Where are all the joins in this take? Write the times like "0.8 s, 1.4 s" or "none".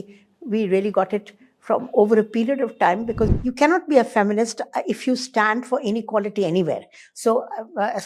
3.3 s